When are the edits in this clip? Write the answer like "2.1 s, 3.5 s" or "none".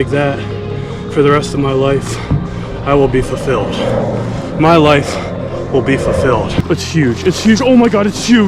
6.6 s